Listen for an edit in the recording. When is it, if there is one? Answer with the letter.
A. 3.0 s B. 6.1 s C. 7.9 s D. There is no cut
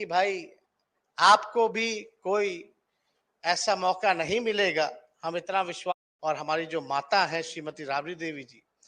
B